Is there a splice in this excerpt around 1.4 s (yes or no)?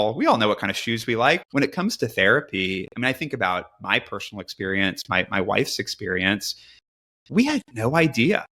yes